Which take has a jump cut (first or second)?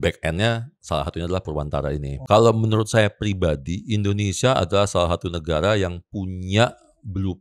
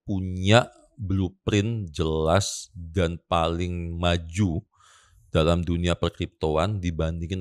first